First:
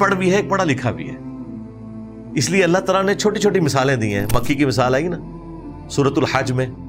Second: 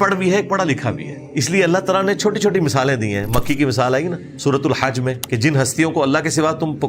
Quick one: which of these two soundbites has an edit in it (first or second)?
second